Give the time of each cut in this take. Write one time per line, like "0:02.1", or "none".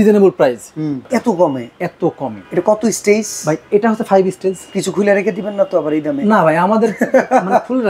0:01.0
0:02.3